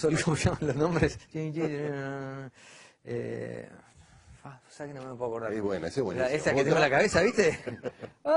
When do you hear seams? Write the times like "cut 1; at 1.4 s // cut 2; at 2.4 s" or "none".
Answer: cut 1; at 2.1 s